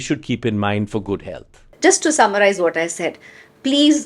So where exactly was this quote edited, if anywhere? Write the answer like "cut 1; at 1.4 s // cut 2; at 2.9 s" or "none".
cut 1; at 1.6 s